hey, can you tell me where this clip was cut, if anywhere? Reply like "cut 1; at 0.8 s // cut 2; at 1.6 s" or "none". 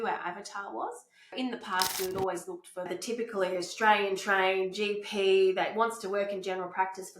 cut 1; at 1.3 s // cut 2; at 2.9 s